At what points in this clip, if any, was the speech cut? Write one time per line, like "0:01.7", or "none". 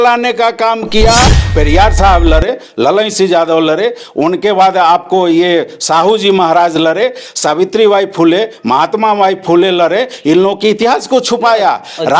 0:01.4